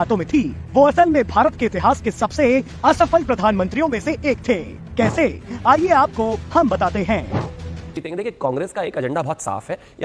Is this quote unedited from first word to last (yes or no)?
no